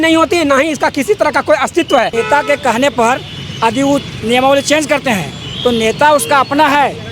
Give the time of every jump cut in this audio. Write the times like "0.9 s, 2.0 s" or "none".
2.1 s